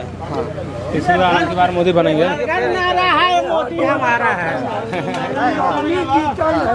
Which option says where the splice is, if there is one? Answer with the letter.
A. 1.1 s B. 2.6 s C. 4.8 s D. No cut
D